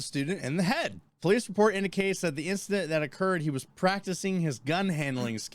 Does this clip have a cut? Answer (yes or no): yes